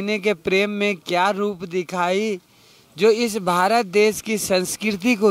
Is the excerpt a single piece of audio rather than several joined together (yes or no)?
yes